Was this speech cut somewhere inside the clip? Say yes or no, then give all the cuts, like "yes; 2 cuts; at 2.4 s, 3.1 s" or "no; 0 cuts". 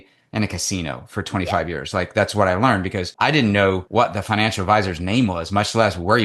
yes; 2 cuts; at 3.0 s, 3.8 s